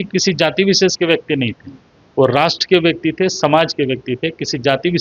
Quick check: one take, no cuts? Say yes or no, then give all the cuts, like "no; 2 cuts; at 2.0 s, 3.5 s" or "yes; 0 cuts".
yes; 0 cuts